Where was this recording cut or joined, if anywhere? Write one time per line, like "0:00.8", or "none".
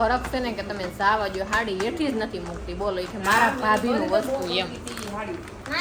none